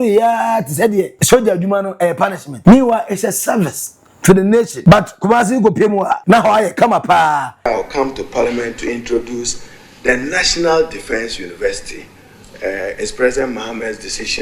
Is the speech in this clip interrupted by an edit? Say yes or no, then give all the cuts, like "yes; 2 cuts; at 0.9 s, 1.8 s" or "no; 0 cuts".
yes; 5 cuts; at 1.2 s, 2.5 s, 4.7 s, 6.2 s, 7.6 s